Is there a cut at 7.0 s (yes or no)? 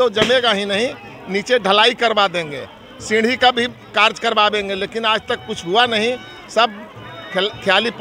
no